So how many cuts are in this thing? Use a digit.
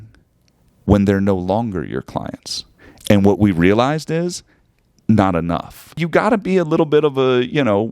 1